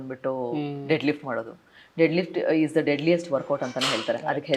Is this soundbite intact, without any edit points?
yes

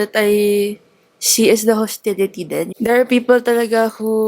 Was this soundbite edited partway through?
yes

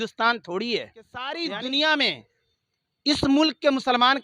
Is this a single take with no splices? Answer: no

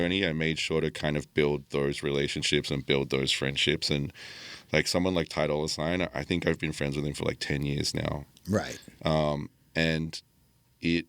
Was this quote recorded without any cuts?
yes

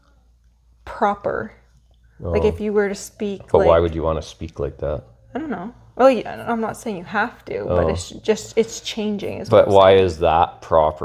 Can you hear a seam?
no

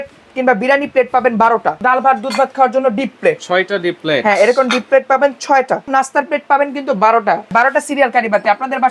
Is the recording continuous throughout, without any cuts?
no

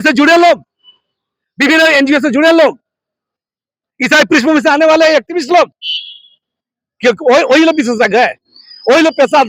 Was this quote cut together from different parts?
no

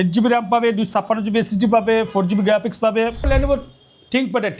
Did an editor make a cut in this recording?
yes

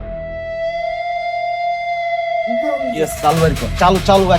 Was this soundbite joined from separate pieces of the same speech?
yes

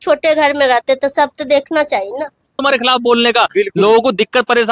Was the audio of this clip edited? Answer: yes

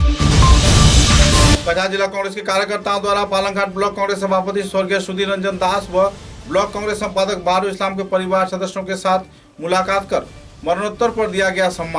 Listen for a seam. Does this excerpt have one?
yes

